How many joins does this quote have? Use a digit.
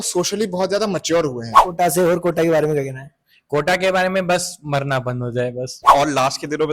2